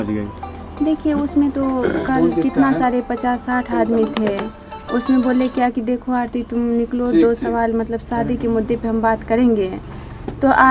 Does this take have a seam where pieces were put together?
no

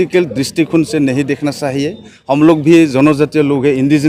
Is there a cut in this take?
no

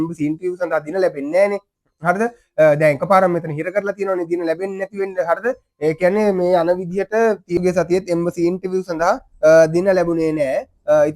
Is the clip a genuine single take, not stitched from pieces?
no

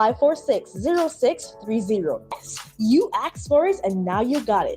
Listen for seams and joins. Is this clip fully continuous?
no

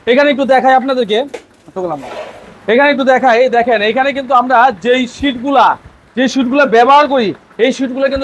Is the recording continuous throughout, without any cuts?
yes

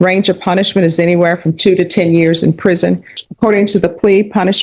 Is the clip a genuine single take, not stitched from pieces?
no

